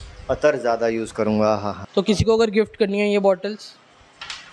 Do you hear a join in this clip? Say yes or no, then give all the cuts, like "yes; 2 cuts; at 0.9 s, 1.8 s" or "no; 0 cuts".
yes; 1 cut; at 1.8 s